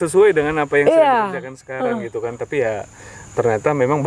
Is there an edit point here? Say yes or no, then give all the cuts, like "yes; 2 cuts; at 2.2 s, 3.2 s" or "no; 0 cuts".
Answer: no; 0 cuts